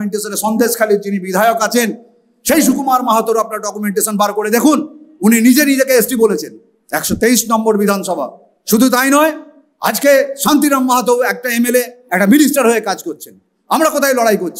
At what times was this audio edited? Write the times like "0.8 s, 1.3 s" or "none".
none